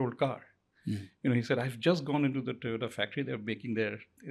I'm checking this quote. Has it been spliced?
no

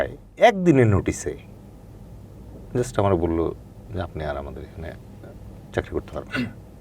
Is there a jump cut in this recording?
no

